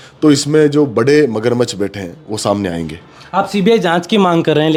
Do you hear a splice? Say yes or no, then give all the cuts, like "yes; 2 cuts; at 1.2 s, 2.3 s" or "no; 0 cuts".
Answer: no; 0 cuts